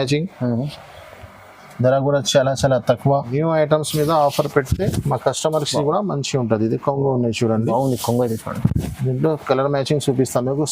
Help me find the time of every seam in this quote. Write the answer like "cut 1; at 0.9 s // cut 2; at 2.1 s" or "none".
cut 1; at 3.3 s